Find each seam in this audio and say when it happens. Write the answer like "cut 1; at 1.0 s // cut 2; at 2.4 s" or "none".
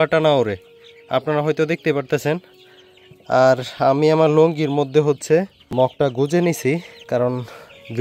cut 1; at 5.9 s // cut 2; at 6.9 s